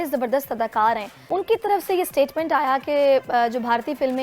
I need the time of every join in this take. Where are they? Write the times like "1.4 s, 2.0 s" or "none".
1.1 s